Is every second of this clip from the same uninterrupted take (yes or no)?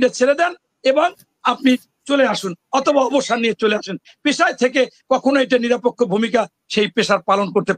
yes